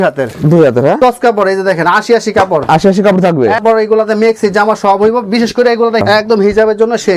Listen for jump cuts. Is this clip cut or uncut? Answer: cut